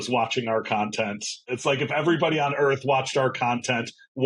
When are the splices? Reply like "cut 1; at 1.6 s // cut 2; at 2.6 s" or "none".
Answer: cut 1; at 1.5 s